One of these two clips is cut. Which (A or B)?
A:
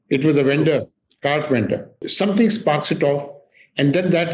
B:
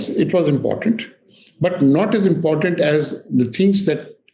A